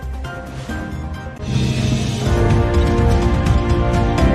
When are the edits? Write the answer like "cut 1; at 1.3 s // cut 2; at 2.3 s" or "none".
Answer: none